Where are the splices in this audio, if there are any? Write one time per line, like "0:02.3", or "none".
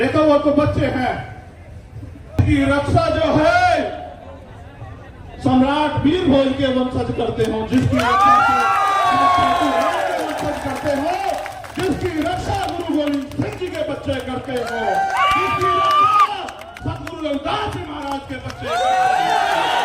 0:02.4